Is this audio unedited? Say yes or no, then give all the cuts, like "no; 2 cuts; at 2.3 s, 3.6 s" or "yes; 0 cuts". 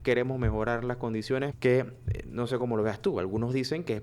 no; 1 cut; at 1.5 s